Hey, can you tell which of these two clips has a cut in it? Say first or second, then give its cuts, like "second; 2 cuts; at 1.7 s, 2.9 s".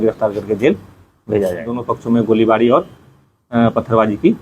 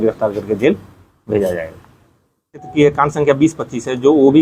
first; 1 cut; at 1.8 s